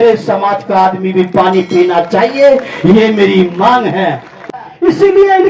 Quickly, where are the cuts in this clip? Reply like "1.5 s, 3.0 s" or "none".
4.5 s